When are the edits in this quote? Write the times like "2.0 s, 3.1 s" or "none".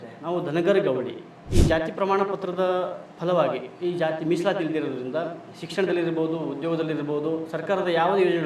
1.4 s